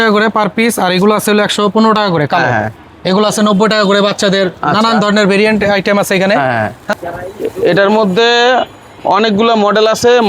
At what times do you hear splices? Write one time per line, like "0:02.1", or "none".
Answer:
0:06.9